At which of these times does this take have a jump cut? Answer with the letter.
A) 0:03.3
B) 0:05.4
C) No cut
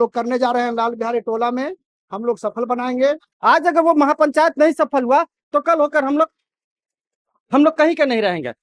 A